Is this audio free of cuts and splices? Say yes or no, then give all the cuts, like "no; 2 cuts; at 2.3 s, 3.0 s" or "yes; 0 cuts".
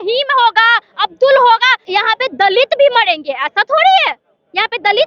no; 1 cut; at 1.8 s